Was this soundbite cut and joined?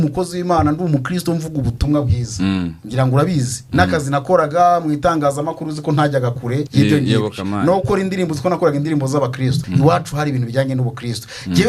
yes; 2 cuts; at 6.7 s, 9.6 s

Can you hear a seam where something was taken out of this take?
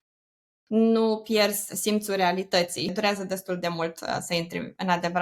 yes; 1 cut; at 2.9 s

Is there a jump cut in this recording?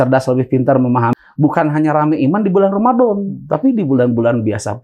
yes; 1 cut; at 1.1 s

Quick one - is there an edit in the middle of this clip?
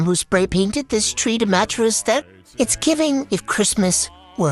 no; 0 cuts

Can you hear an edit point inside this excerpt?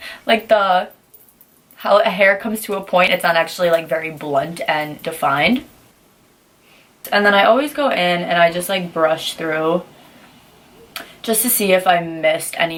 no; 0 cuts

